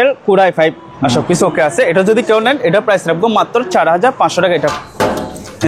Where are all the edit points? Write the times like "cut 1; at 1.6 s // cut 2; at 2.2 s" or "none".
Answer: cut 1; at 0.9 s // cut 2; at 4.7 s